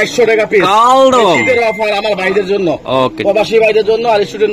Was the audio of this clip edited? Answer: no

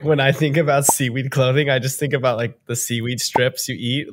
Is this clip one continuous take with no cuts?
yes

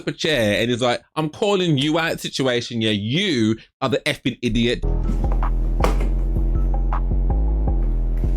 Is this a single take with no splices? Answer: no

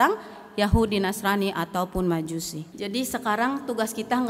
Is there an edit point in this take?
yes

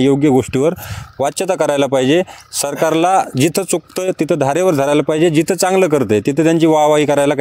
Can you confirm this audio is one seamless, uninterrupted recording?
yes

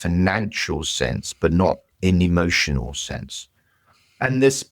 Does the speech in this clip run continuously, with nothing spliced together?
no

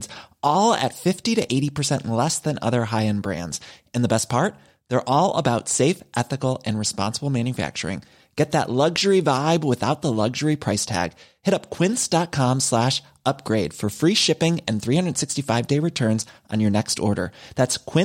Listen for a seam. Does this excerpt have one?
no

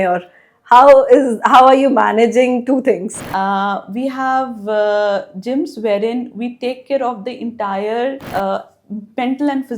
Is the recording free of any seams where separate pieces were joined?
no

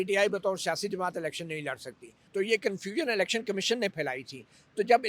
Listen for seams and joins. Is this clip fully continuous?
no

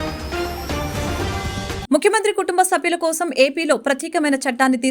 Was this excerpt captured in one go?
no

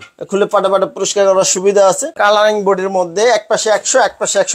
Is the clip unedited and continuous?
no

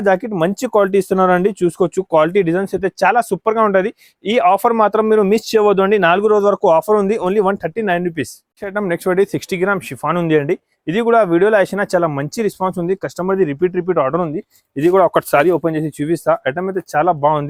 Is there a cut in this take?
no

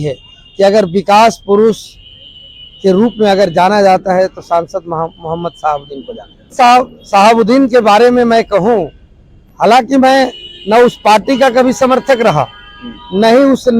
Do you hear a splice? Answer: yes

